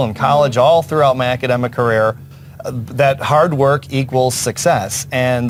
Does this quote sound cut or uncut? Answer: uncut